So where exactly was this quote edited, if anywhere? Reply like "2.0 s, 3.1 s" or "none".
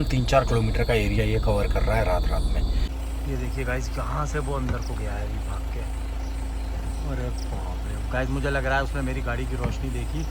2.9 s